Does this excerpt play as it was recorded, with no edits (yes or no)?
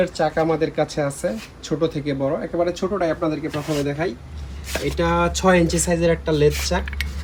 yes